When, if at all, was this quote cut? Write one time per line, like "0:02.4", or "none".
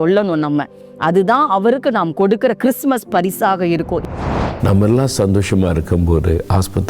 0:04.0